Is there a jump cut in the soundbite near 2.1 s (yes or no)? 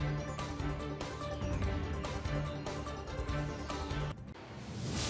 yes